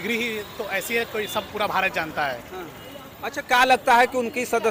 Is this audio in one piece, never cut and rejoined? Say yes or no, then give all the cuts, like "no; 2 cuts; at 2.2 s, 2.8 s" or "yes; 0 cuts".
yes; 0 cuts